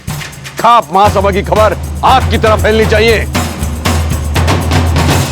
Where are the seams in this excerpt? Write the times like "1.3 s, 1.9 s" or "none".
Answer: 3.3 s